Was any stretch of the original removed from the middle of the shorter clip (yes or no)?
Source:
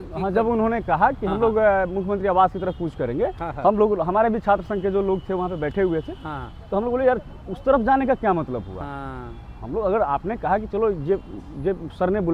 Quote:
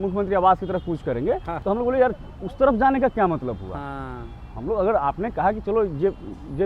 yes